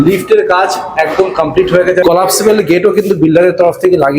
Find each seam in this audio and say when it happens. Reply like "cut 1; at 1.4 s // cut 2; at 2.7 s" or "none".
cut 1; at 2.0 s